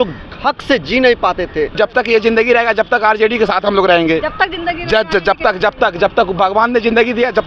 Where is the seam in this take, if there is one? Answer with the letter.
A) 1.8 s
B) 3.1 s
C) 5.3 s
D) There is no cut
A